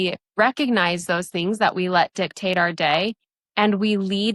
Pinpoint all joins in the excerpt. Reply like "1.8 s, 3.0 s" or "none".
none